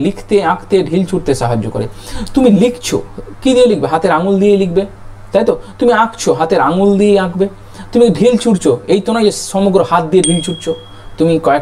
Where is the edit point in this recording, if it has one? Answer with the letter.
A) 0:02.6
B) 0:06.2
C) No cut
C